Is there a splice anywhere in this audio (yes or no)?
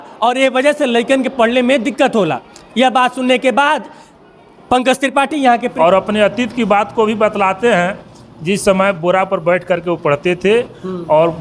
yes